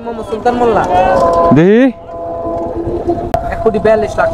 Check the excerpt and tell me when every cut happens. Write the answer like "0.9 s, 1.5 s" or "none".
3.3 s